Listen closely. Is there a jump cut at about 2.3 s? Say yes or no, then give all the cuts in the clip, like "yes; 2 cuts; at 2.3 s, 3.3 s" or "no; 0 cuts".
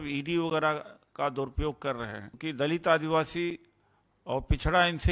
yes; 1 cut; at 2.3 s